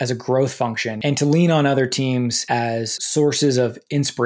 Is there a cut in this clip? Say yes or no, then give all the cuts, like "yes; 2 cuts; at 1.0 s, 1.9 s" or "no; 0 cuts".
yes; 2 cuts; at 0.9 s, 2.7 s